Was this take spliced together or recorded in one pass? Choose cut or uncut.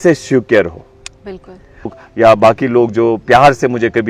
cut